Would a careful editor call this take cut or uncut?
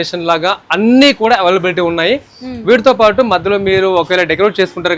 uncut